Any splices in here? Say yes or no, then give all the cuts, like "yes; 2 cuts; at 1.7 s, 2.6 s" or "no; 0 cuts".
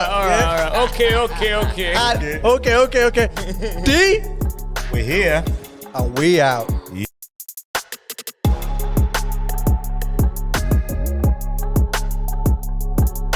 yes; 1 cut; at 7.0 s